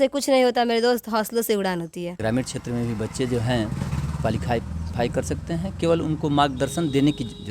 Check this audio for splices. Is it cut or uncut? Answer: cut